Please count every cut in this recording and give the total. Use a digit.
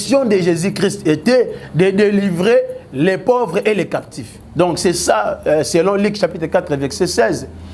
0